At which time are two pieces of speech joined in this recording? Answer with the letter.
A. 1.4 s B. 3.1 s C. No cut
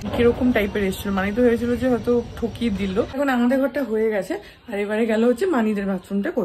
B